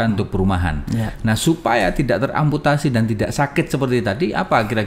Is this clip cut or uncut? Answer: uncut